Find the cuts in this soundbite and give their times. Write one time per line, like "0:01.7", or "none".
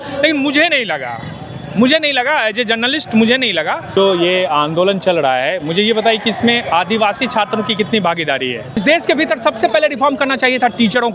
0:03.9
0:08.8